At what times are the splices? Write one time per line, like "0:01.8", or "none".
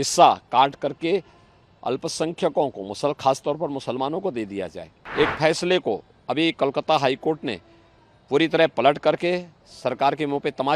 0:05.0